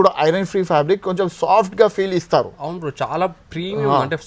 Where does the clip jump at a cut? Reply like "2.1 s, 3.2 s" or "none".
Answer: none